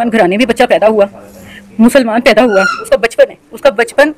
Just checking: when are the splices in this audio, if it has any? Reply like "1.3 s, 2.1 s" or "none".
2.8 s